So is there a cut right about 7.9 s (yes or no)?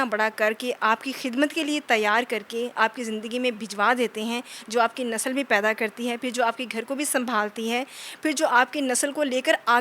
no